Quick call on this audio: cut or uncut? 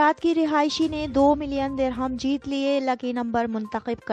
uncut